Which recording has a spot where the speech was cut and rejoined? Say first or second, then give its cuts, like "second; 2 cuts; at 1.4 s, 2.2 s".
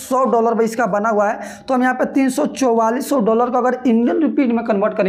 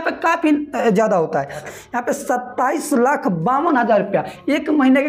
second; 1 cut; at 1.7 s